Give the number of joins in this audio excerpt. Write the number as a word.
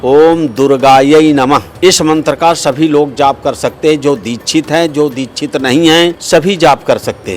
two